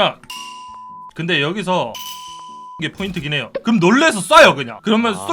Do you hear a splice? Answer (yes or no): yes